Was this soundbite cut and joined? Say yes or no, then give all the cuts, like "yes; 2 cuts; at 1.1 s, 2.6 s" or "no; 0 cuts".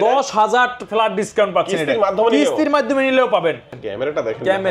yes; 1 cut; at 3.8 s